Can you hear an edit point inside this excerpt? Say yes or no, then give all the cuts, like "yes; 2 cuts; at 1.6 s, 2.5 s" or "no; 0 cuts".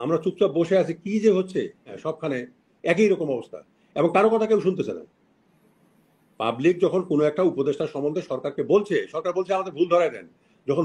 yes; 1 cut; at 2.1 s